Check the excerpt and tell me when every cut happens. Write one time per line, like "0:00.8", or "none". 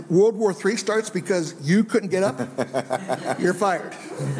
none